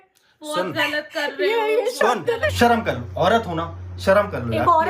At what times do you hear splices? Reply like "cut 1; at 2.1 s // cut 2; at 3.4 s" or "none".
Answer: cut 1; at 2.5 s